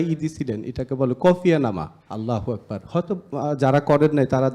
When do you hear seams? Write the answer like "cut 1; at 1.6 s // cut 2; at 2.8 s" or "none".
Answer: cut 1; at 2.0 s

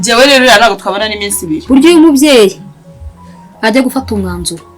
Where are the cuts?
cut 1; at 1.6 s

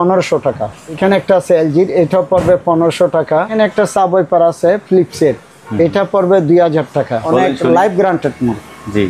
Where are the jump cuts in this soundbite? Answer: cut 1; at 1.0 s // cut 2; at 3.5 s // cut 3; at 7.2 s

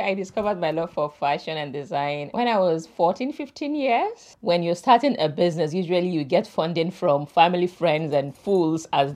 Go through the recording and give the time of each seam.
cut 1; at 2.2 s // cut 2; at 4.2 s

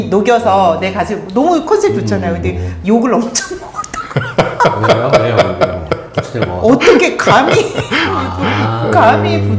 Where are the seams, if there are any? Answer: none

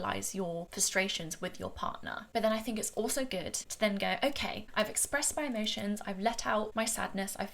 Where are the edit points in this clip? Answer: cut 1; at 3.6 s // cut 2; at 4.6 s // cut 3; at 6.7 s

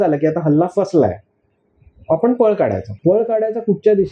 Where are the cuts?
cut 1; at 2.9 s

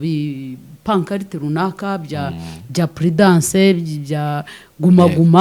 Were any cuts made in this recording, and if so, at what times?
none

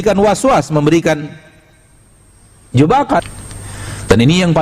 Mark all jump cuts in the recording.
cut 1; at 3.2 s

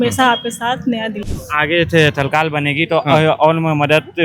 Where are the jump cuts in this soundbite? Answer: cut 1; at 1.4 s

